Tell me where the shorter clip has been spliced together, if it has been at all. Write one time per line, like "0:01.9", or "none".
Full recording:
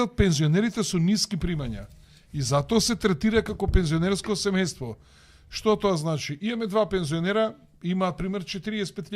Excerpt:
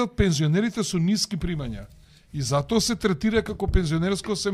none